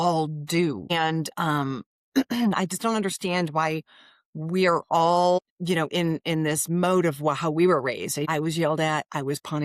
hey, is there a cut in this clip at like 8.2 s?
yes; 1 cut; at 8.2 s

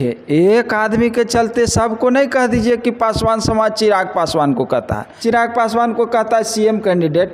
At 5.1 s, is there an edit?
yes; 1 cut; at 5.1 s

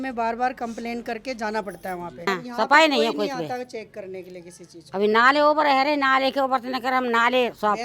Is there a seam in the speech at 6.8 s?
no; 1 cut; at 2.3 s

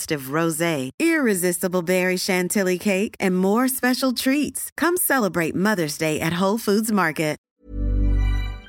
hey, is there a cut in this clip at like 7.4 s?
yes; 1 cut; at 7.4 s

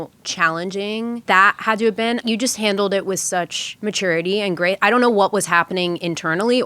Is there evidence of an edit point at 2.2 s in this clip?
yes; 3 cuts; at 1.2 s, 2.2 s, 3.6 s

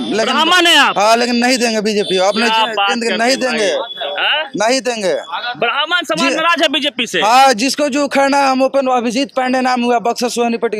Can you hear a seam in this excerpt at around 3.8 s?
no; 0 cuts

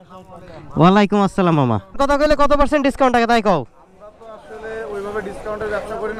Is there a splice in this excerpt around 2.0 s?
yes; 1 cut; at 2.0 s

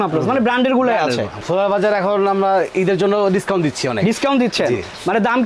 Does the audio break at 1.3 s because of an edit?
yes; 1 cut; at 1.3 s

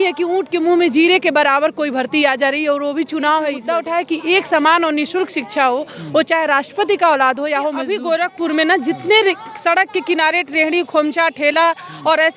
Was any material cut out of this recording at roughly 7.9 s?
yes; 2 cuts; at 3.6 s, 7.9 s

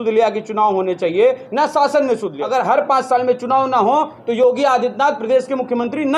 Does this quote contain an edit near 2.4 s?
yes; 1 cut; at 2.4 s

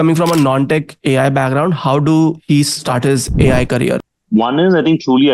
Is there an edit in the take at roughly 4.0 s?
yes; 2 cuts; at 2.7 s, 4.0 s

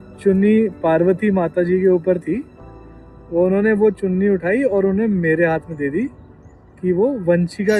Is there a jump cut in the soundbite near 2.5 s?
no; 0 cuts

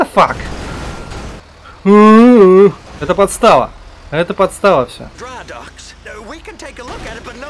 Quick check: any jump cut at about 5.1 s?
yes; 3 cuts; at 1.4 s, 2.9 s, 5.1 s

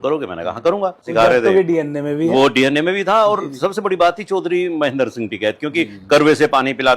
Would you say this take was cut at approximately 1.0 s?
yes; 1 cut; at 1.0 s

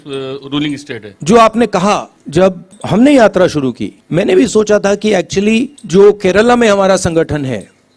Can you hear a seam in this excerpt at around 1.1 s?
yes; 4 cuts; at 1.1 s, 2.4 s, 3.9 s, 5.8 s

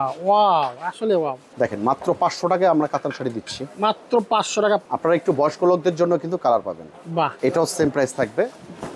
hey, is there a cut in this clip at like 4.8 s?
yes; 3 cuts; at 1.4 s, 4.8 s, 7.3 s

